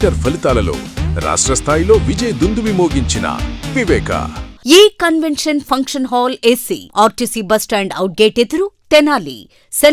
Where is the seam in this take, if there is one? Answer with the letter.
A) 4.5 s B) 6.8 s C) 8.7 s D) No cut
A